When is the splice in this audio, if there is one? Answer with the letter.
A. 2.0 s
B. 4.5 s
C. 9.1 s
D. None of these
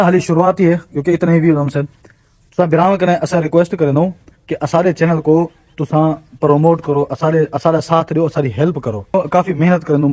C